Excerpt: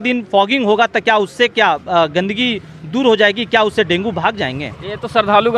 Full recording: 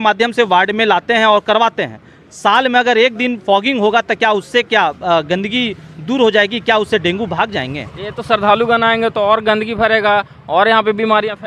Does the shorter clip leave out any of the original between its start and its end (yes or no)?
no